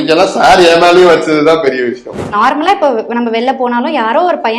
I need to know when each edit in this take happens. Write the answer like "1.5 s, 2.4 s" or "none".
2.3 s